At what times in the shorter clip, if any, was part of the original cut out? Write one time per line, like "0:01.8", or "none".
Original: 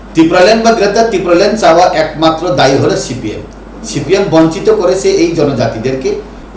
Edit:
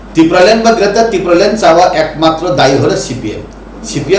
none